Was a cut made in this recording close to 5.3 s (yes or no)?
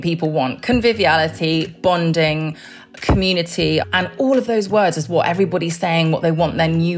no